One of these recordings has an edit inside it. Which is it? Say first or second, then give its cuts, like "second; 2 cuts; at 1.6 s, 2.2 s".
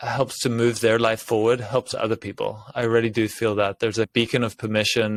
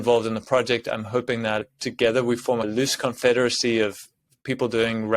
second; 2 cuts; at 1.7 s, 2.7 s